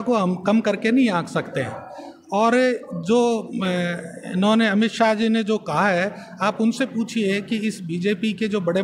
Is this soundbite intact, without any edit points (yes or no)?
yes